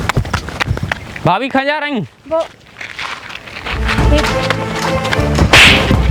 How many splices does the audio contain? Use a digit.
1